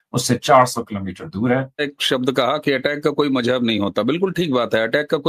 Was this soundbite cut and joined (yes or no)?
yes